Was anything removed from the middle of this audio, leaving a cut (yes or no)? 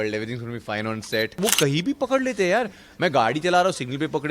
yes